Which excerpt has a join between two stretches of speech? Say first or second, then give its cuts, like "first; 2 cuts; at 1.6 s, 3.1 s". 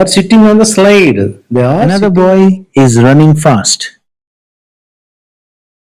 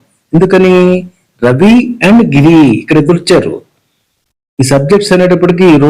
first; 1 cut; at 1.8 s